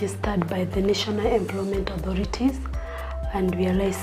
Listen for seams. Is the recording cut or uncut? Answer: uncut